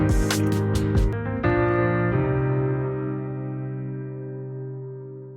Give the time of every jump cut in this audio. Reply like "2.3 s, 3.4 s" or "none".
1.1 s